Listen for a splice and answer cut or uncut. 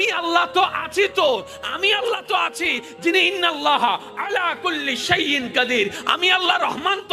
uncut